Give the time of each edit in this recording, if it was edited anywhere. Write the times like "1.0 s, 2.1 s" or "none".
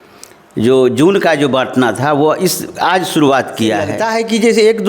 4.0 s